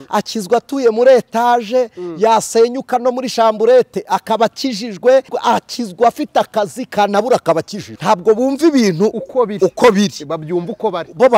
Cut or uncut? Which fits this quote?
cut